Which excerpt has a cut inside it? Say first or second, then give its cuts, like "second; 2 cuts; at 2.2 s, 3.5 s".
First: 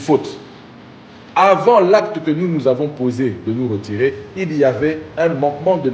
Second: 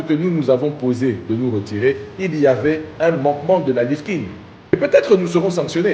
second; 1 cut; at 4.7 s